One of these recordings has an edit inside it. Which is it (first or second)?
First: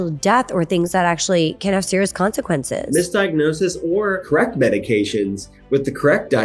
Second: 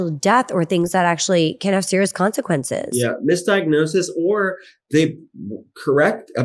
first